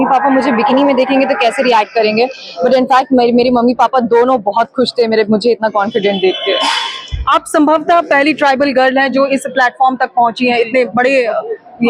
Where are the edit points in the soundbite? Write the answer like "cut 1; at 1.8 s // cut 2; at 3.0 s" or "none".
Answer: none